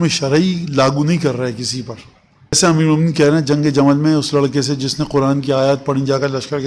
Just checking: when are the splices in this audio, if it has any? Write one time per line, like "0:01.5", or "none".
0:02.6